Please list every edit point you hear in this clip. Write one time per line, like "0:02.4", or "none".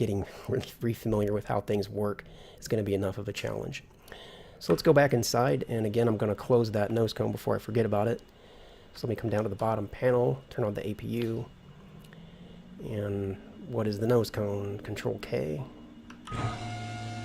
0:03.3